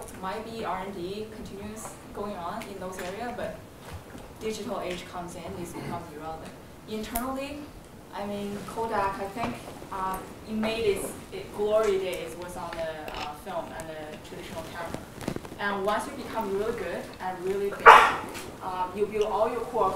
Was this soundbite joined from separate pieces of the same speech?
no; 0 cuts

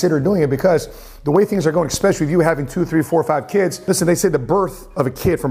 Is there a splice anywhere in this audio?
no; 0 cuts

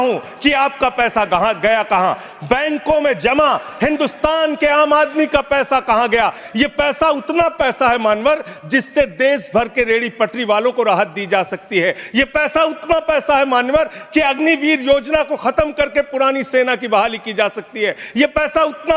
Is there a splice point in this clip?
yes; 1 cut; at 6.4 s

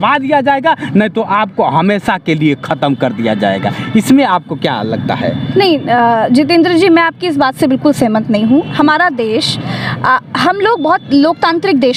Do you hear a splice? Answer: no; 0 cuts

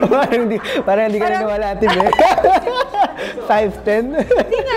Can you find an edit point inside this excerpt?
no; 0 cuts

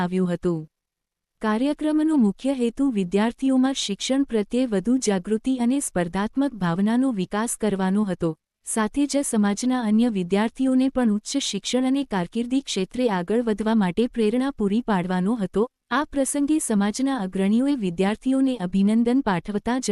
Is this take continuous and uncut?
no; 1 cut; at 3.5 s

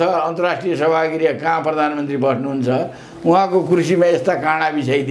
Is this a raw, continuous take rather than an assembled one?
yes; 0 cuts

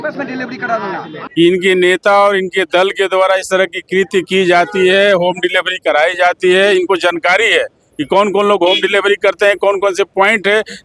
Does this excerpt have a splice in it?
yes; 1 cut; at 1.1 s

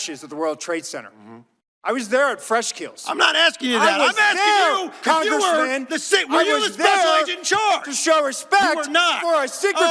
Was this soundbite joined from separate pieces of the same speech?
no; 0 cuts

